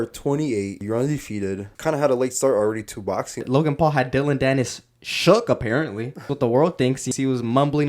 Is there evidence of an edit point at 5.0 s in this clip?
no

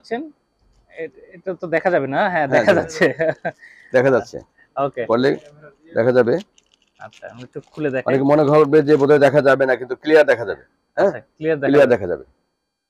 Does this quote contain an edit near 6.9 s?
no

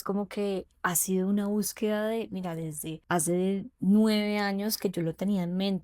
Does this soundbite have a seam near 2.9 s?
yes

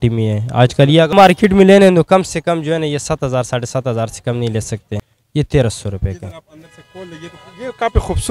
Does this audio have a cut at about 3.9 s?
no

